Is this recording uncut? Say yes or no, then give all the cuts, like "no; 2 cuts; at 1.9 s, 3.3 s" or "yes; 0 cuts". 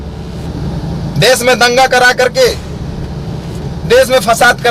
yes; 0 cuts